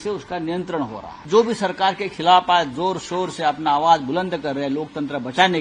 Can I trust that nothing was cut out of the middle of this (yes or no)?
no